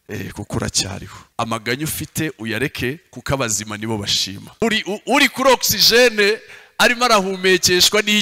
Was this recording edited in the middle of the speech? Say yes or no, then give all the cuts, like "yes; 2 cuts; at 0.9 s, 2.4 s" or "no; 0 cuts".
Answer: yes; 2 cuts; at 1.2 s, 4.6 s